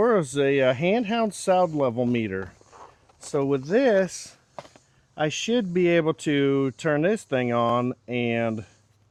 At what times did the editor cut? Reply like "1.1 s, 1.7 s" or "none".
none